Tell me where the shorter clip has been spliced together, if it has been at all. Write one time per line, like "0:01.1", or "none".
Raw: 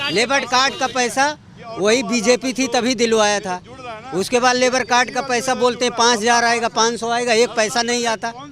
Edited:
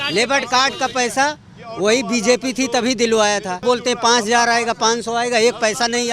0:03.6